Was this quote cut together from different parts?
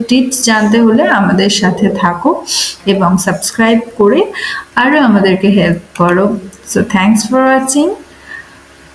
no; 0 cuts

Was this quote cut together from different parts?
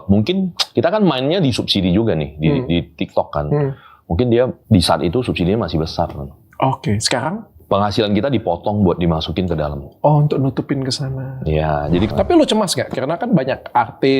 yes; 3 cuts; at 4.6 s, 7.5 s, 12.1 s

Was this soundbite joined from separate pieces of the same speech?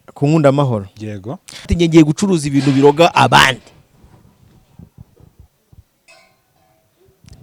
yes; 1 cut; at 1.7 s

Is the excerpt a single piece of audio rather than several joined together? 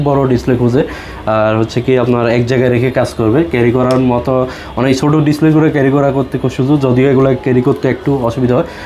yes; 0 cuts

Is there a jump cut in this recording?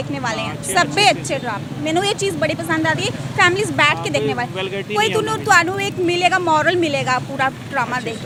no; 0 cuts

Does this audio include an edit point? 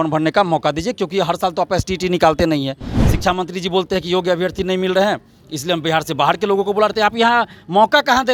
no; 0 cuts

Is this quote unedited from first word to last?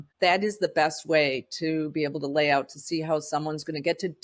yes; 0 cuts

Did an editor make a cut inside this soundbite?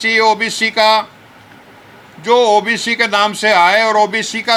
no; 0 cuts

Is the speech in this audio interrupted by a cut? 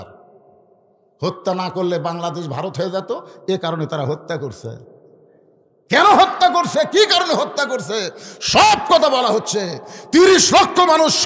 no; 0 cuts

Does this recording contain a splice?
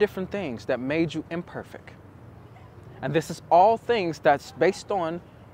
no; 0 cuts

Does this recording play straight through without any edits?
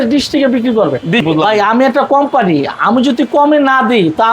no; 1 cut; at 1.2 s

